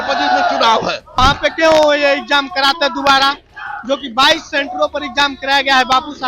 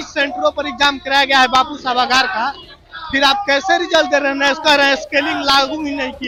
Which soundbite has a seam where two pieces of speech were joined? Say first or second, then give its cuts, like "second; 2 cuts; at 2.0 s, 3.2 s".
first; 1 cut; at 1.2 s